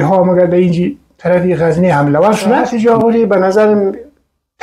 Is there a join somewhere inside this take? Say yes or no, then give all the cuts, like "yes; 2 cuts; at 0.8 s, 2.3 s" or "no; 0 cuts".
yes; 1 cut; at 2.7 s